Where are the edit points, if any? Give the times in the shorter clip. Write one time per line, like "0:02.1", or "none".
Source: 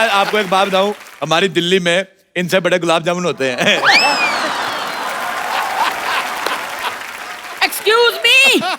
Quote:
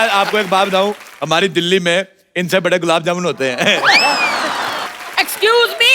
0:04.9